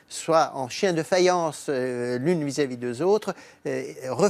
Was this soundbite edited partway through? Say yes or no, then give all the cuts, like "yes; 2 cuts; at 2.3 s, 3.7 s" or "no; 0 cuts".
no; 0 cuts